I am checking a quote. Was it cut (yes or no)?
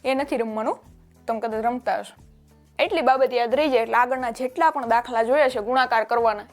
yes